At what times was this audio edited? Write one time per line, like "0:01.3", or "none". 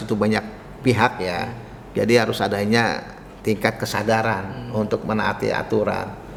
none